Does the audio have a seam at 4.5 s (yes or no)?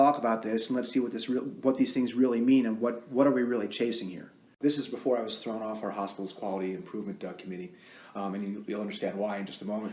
yes